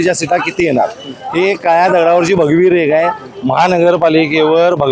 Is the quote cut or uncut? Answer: uncut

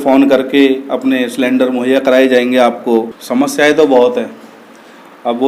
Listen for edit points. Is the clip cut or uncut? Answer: cut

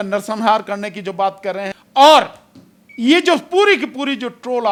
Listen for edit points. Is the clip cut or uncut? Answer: uncut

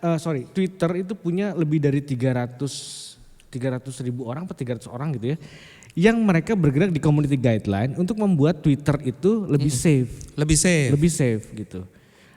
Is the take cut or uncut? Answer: uncut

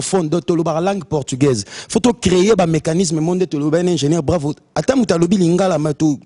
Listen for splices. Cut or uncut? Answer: uncut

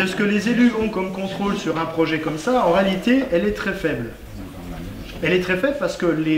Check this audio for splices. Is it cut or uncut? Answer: uncut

